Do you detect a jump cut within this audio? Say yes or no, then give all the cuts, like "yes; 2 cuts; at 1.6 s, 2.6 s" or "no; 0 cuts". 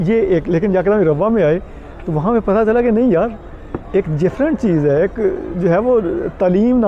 no; 0 cuts